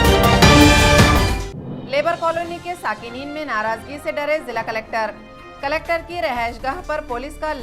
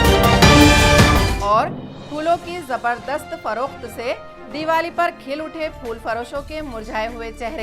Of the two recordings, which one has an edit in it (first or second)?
first